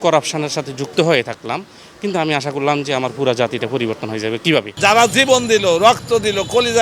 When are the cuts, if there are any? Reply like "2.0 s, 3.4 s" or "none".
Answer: 4.7 s